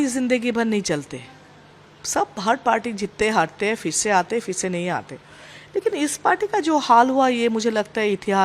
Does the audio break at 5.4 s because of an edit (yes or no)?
no